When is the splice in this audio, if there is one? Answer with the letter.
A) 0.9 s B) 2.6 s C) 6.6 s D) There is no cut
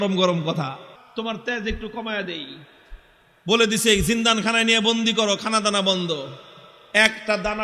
A